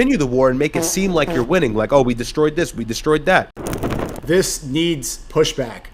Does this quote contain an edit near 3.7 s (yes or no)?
yes